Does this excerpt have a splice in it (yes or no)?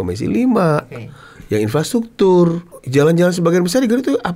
yes